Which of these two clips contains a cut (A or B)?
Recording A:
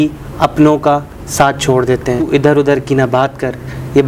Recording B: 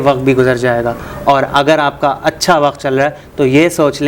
A